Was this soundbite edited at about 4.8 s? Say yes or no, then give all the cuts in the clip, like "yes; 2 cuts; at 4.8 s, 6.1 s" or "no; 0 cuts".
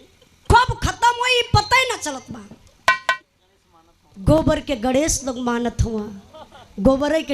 no; 1 cut; at 3.0 s